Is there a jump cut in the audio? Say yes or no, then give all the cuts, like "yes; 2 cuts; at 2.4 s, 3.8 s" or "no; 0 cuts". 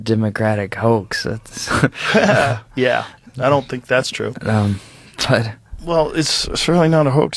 no; 0 cuts